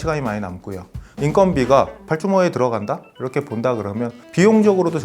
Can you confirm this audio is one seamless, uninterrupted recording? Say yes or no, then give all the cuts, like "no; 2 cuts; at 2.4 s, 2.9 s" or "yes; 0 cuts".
no; 4 cuts; at 1.1 s, 2.0 s, 3.1 s, 4.2 s